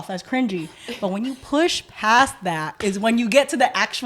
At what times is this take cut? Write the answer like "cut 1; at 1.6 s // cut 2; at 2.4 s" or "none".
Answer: none